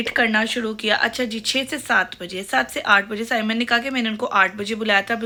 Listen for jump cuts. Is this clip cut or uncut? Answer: uncut